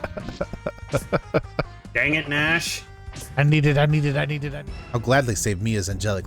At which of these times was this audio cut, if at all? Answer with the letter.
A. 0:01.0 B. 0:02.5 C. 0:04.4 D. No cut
C